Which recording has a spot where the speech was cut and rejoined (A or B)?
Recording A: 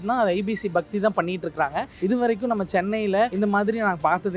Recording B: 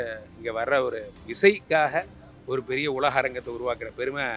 A